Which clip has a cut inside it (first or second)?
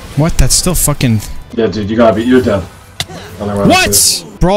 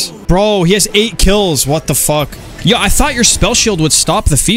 first